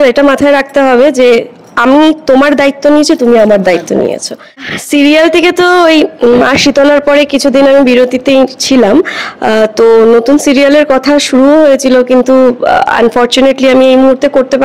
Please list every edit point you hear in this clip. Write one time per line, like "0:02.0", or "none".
0:04.7